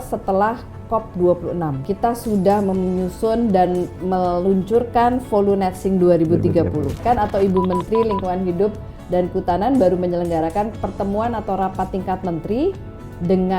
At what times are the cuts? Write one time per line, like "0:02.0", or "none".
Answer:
0:01.8
0:07.0